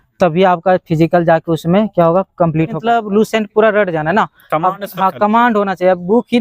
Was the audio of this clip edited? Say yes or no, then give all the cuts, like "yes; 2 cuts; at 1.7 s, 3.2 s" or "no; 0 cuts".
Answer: yes; 1 cut; at 2.8 s